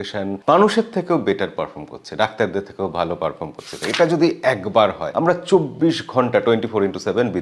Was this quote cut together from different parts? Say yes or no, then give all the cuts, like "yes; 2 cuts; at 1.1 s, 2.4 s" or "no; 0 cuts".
yes; 1 cut; at 3.8 s